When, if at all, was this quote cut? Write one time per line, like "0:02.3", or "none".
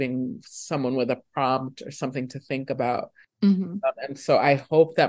none